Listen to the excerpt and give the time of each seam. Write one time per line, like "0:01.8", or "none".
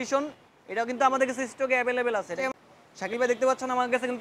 0:02.4